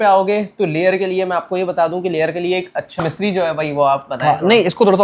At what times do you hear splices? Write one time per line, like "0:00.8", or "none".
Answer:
0:02.9